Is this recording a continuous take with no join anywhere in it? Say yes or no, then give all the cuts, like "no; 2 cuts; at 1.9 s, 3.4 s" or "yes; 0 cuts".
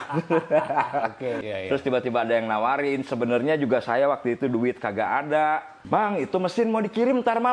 no; 2 cuts; at 1.4 s, 5.7 s